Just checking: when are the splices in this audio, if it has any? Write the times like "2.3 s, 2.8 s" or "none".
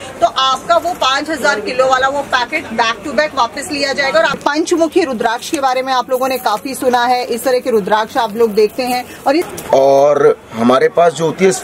4.4 s, 9.5 s